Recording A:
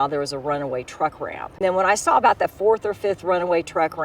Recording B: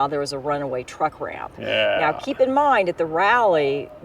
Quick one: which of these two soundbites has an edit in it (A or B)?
A